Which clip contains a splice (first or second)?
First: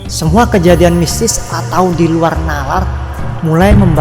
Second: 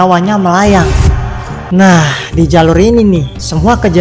second